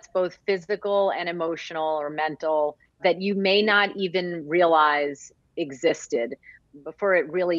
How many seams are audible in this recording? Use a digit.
2